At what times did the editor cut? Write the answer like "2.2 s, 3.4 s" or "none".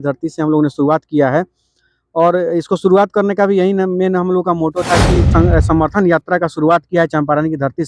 5.3 s

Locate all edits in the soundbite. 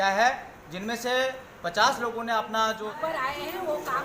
2.9 s

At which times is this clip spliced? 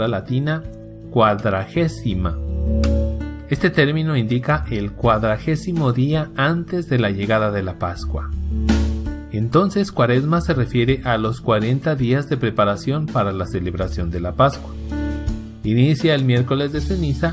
2.6 s

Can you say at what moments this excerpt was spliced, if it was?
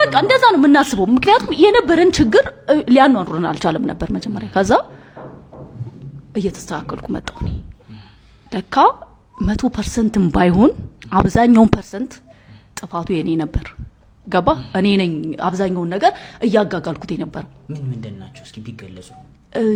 none

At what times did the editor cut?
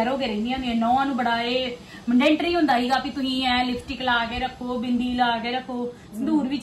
none

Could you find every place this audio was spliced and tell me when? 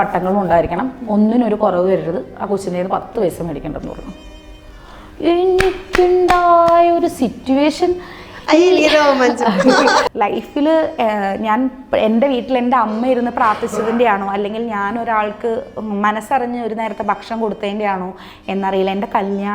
10.0 s

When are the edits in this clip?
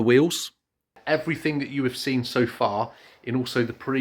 1.0 s

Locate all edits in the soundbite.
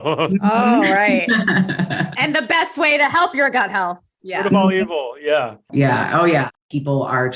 5.6 s, 6.5 s

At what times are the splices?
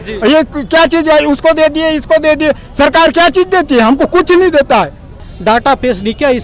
5.3 s

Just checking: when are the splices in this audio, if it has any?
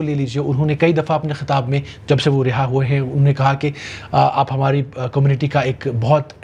none

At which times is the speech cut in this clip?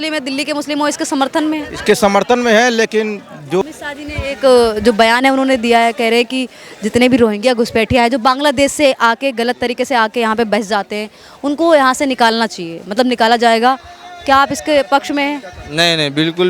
3.6 s

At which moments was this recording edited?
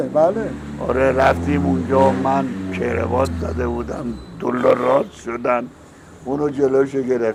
none

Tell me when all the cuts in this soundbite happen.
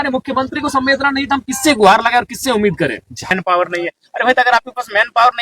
3.3 s

